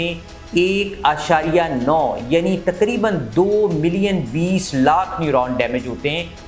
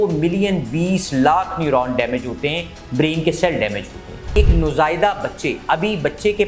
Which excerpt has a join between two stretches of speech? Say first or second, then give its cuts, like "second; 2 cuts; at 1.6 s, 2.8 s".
second; 1 cut; at 4.3 s